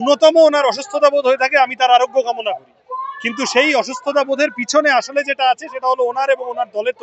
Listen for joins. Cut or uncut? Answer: uncut